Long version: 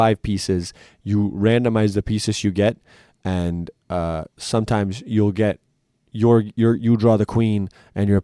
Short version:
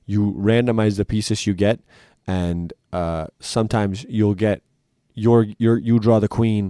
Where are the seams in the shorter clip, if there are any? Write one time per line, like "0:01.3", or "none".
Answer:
none